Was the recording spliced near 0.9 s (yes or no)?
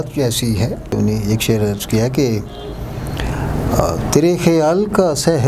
yes